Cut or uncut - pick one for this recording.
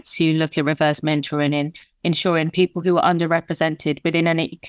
uncut